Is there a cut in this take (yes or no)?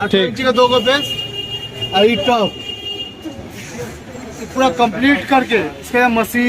no